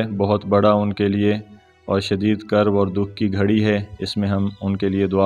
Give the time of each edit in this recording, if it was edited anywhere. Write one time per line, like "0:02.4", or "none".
none

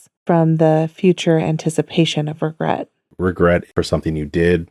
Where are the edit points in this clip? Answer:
0:03.7

